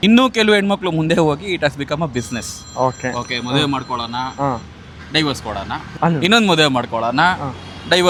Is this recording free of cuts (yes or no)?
yes